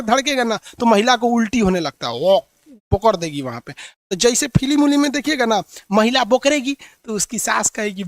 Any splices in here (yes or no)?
no